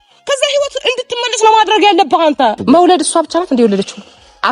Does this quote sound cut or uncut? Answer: cut